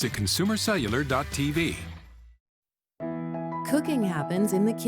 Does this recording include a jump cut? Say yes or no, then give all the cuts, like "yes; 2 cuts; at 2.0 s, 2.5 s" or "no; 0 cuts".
yes; 1 cut; at 2.0 s